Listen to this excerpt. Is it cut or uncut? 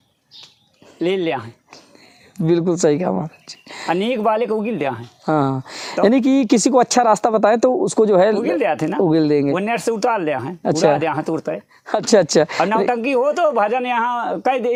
uncut